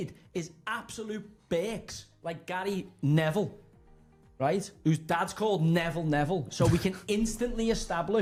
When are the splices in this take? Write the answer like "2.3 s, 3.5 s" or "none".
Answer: none